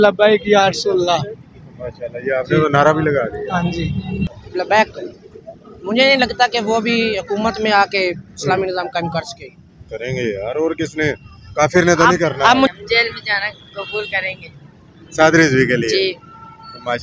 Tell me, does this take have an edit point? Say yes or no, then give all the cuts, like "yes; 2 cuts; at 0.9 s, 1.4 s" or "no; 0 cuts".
yes; 2 cuts; at 4.2 s, 12.7 s